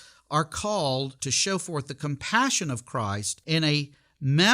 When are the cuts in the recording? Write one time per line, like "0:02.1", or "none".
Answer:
0:01.2
0:03.3